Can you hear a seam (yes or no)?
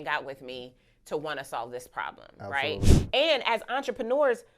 yes